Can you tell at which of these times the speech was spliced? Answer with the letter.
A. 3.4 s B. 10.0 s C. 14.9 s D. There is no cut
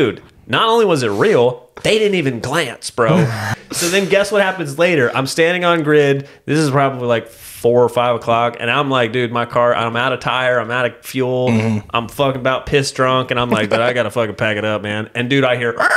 A